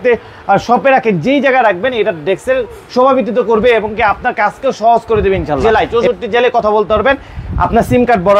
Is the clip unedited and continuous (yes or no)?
no